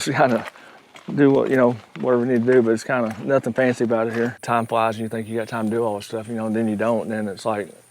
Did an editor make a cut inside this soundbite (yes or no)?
yes